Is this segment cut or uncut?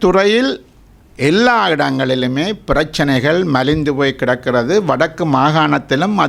uncut